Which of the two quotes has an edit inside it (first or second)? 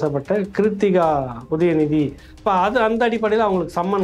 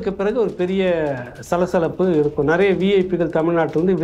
first